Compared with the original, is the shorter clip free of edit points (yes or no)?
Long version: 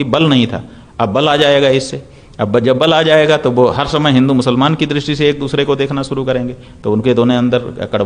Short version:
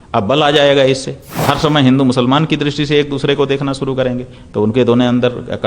no